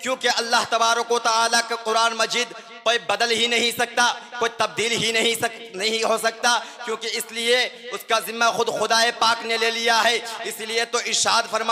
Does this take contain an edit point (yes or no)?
no